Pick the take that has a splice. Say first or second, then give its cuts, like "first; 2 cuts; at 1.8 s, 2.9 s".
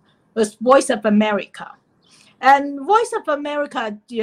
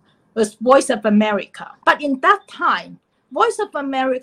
second; 1 cut; at 1.7 s